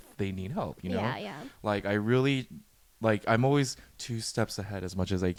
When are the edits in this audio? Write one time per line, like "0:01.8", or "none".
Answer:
none